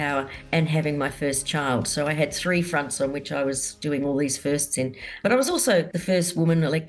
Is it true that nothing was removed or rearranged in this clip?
no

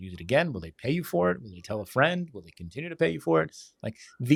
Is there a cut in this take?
no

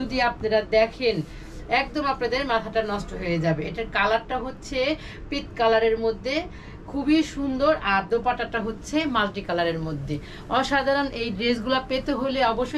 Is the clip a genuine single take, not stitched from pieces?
yes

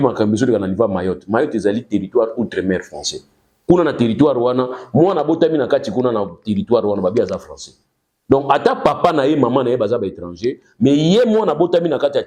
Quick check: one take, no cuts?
yes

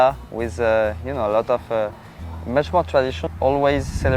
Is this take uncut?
no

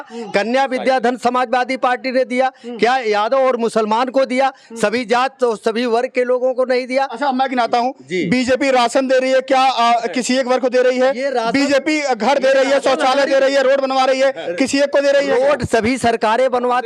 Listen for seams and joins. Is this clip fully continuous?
yes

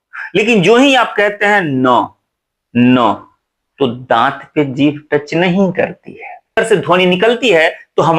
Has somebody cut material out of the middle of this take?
yes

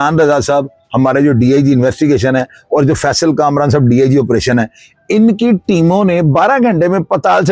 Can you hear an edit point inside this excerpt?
no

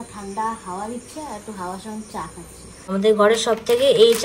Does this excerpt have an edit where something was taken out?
yes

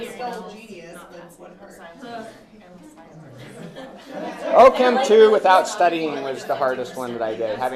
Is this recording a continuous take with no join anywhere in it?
yes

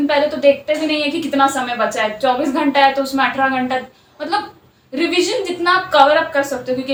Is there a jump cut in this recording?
no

